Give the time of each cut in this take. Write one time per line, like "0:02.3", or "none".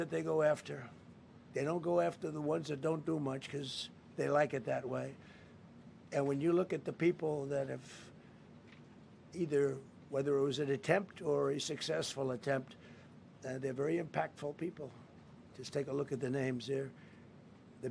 none